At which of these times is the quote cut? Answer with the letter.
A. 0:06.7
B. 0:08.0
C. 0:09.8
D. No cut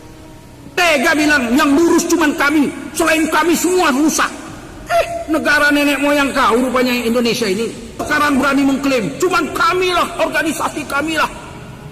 B